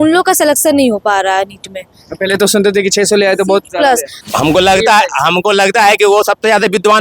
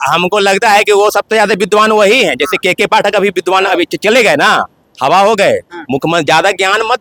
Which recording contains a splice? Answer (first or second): first